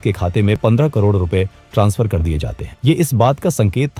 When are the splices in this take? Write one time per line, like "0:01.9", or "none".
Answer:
none